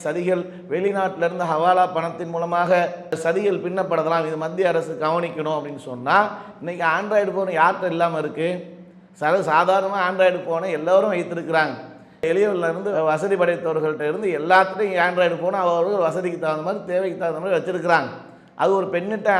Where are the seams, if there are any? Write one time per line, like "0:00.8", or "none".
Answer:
none

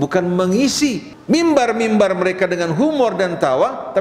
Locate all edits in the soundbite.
0:01.1

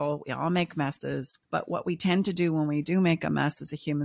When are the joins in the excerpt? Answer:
0:01.3

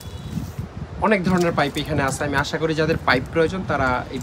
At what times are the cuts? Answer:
none

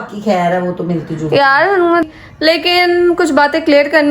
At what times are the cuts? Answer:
0:02.0

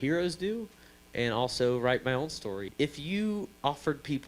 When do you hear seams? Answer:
0:02.7

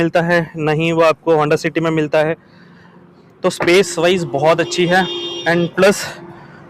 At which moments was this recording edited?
none

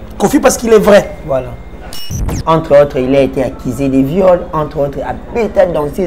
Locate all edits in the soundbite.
0:01.9

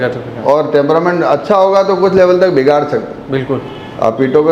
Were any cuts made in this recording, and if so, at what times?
none

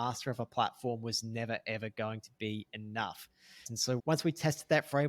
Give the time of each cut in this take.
0:03.7

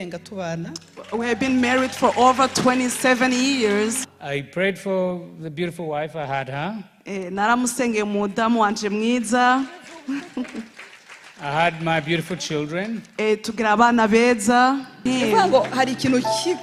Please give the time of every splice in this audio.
0:04.0
0:15.0

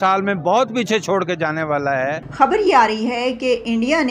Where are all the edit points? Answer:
0:02.2

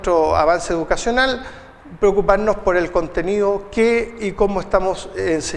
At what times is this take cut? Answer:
0:04.1

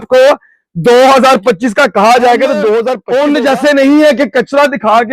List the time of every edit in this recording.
0:03.0

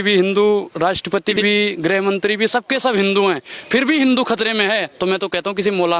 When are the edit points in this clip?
none

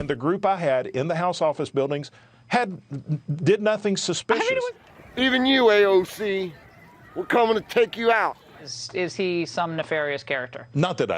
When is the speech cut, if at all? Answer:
0:04.7
0:08.8

